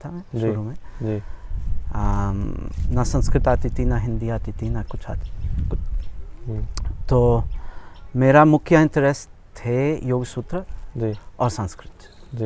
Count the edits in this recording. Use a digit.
0